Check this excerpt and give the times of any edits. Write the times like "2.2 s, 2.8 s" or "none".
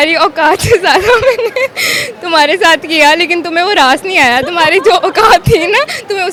none